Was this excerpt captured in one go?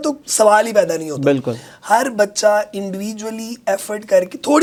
yes; 0 cuts

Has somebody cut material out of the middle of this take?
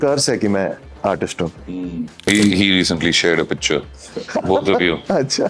yes; 1 cut; at 1.6 s

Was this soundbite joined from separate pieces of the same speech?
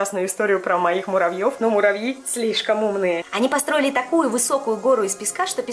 yes; 1 cut; at 1.6 s

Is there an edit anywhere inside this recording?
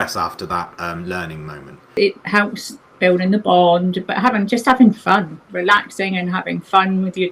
yes; 1 cut; at 1.9 s

